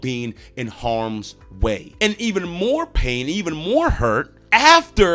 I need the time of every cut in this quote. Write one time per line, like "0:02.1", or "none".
0:01.9